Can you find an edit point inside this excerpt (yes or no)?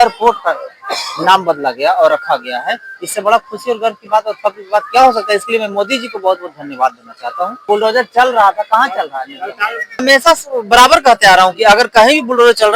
yes